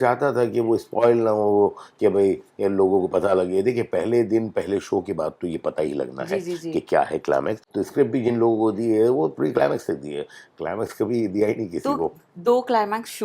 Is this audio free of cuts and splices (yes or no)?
no